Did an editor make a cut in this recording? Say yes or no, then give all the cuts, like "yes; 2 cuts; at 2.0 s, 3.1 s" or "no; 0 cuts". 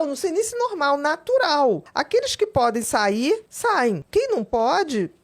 yes; 2 cuts; at 1.9 s, 3.7 s